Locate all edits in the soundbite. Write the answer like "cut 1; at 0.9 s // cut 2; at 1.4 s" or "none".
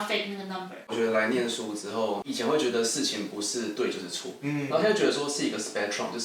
cut 1; at 0.9 s